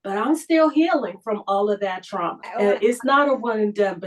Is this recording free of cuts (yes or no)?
no